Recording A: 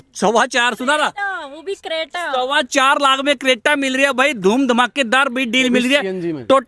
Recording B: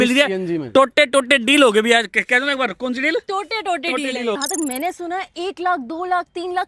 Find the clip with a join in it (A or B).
B